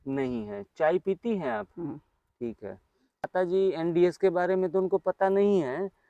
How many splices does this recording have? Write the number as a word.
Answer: one